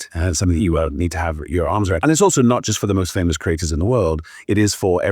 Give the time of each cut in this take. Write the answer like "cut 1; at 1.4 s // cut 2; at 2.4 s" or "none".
cut 1; at 2.0 s